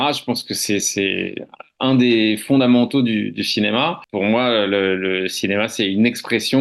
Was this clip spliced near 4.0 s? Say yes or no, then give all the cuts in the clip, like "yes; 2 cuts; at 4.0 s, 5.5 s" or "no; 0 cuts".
yes; 1 cut; at 4.0 s